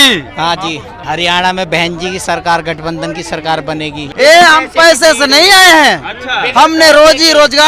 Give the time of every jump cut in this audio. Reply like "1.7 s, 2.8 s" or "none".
0.9 s, 4.0 s